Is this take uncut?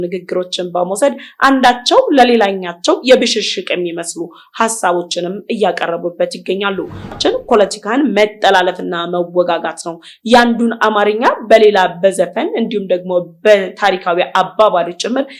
no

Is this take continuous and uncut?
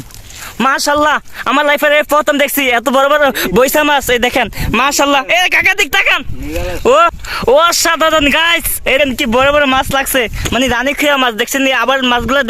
no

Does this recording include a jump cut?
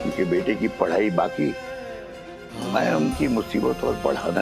yes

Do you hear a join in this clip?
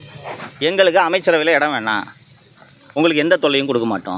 no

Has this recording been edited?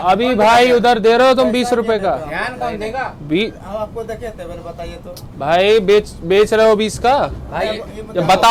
no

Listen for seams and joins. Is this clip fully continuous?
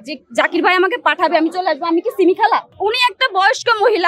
no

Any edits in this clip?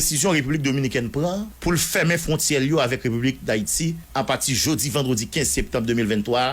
yes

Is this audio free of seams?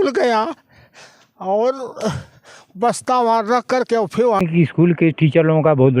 no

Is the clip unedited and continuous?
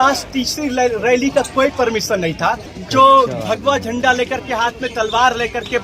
no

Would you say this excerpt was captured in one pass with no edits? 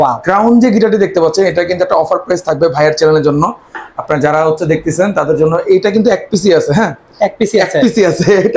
yes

